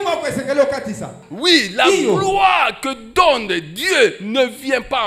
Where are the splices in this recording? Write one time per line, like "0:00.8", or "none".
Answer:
none

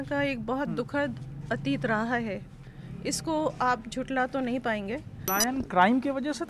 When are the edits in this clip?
0:05.3

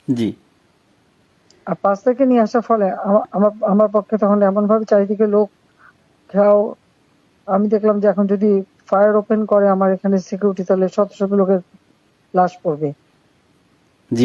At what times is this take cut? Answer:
none

